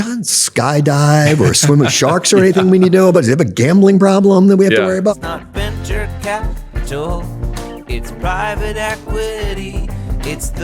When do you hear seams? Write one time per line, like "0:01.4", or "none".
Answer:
0:05.2

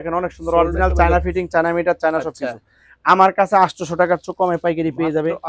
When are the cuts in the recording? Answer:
none

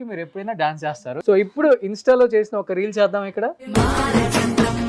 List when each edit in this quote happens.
0:01.1
0:03.6

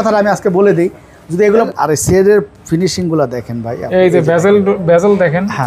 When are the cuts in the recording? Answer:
0:01.7

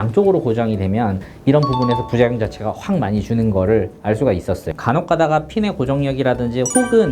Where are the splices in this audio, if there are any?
0:01.3
0:04.7

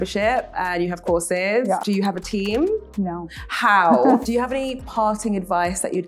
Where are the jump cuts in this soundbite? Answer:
0:01.8
0:02.9
0:04.2

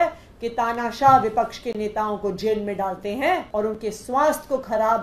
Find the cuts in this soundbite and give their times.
0:03.5

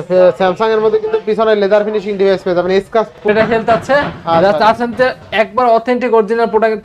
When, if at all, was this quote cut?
0:03.1

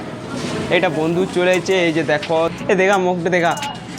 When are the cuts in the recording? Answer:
0:02.6

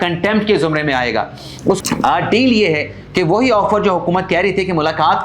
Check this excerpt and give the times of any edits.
0:01.8

